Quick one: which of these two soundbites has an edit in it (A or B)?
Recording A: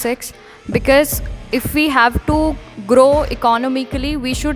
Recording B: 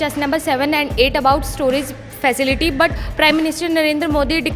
B